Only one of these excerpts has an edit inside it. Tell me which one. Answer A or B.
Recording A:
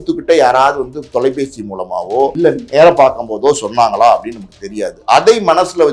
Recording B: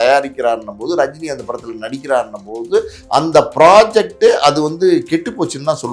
A